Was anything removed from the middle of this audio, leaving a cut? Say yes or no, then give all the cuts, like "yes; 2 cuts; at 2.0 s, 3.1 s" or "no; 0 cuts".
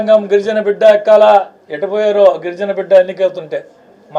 no; 0 cuts